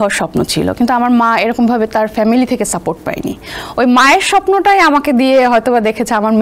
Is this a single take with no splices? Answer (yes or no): yes